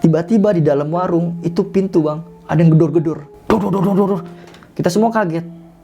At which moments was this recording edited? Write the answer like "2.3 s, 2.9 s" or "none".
3.3 s